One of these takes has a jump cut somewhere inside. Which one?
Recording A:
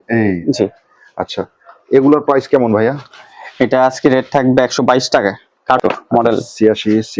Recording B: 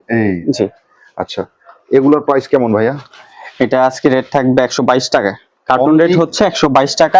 A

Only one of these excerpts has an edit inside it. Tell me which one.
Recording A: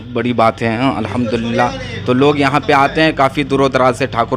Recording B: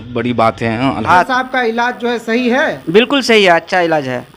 B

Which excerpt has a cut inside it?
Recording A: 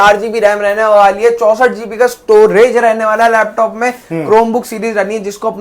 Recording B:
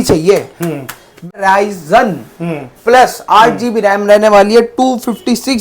B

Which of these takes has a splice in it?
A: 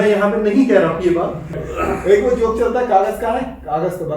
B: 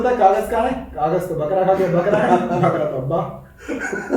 A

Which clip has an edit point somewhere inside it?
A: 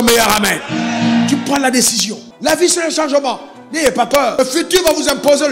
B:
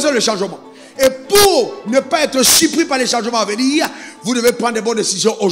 A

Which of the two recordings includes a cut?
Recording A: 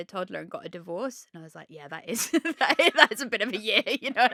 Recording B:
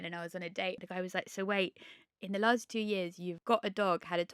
B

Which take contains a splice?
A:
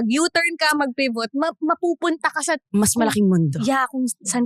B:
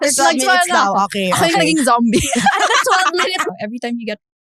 B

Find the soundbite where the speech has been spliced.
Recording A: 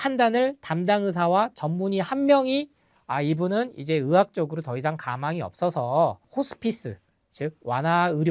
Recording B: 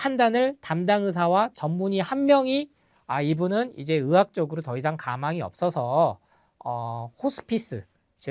A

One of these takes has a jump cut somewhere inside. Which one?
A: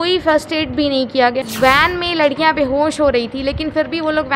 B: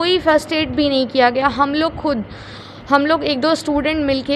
A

